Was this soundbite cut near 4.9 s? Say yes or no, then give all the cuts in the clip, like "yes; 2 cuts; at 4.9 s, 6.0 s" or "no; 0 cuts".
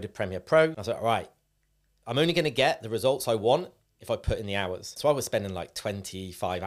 yes; 2 cuts; at 0.8 s, 4.9 s